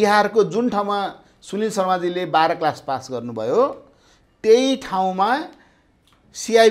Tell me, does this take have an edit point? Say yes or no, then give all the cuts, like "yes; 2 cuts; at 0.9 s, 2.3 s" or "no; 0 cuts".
no; 0 cuts